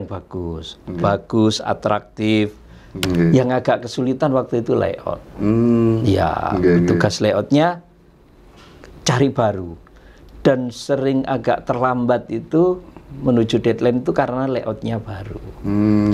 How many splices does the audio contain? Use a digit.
1